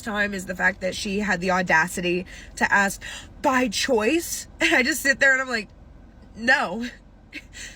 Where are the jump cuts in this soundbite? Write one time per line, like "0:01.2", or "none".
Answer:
none